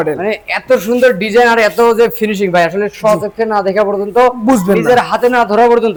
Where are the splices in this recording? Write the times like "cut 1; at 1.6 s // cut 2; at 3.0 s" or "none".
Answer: none